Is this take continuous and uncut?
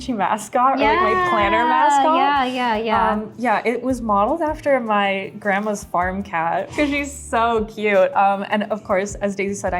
yes; 0 cuts

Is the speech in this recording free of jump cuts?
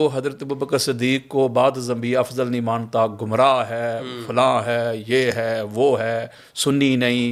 yes; 0 cuts

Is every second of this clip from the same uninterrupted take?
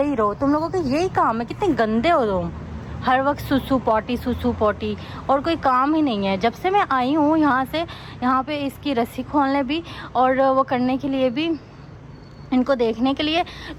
yes; 0 cuts

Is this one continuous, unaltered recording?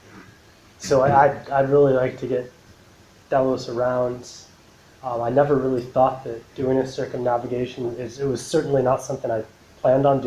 yes; 0 cuts

